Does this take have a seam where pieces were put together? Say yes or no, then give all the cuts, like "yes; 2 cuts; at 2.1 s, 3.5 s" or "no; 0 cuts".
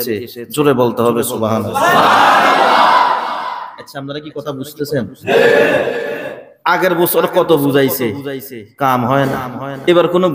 no; 0 cuts